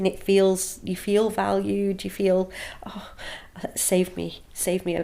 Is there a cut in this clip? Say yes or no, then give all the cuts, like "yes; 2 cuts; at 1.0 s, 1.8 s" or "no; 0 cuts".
no; 0 cuts